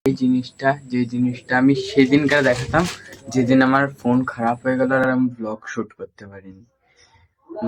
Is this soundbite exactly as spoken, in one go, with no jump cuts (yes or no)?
yes